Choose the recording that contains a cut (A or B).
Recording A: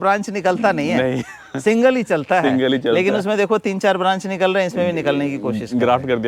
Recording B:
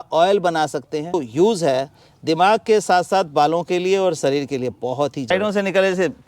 B